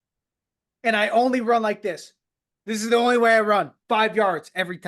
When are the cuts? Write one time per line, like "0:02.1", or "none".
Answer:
0:03.8